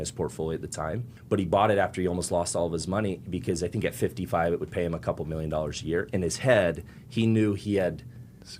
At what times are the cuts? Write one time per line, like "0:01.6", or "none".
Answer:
0:01.1